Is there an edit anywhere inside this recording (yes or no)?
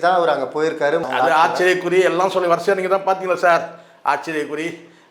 yes